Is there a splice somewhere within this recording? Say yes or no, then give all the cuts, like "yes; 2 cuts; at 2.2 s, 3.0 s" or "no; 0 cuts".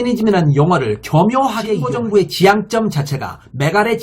yes; 1 cut; at 1.9 s